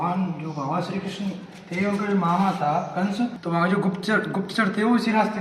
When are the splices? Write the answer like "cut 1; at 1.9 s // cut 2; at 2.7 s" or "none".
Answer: cut 1; at 3.4 s